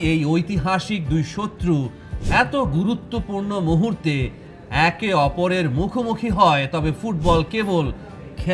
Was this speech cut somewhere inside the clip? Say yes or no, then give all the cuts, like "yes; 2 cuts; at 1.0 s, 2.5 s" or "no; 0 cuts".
no; 0 cuts